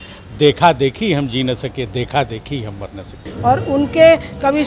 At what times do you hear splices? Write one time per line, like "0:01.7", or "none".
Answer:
0:03.3